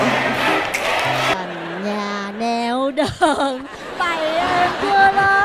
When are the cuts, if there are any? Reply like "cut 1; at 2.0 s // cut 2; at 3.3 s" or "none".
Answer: cut 1; at 1.3 s